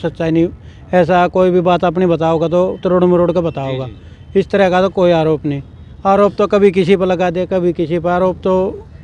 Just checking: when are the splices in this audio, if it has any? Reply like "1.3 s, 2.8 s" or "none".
none